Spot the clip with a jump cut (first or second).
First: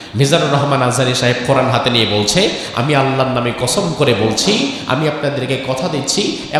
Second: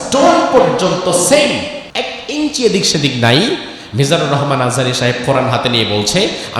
second